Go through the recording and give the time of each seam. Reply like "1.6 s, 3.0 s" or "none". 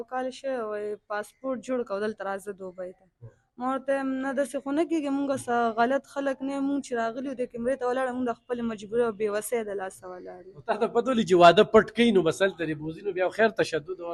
none